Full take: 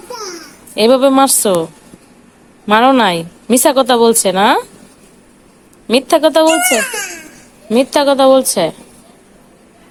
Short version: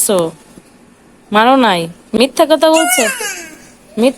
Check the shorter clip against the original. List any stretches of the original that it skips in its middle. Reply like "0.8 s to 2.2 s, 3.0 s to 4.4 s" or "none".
3.5 s to 5.9 s